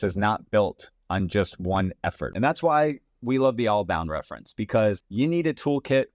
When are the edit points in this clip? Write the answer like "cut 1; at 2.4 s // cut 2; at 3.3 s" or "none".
cut 1; at 2.2 s // cut 2; at 5.0 s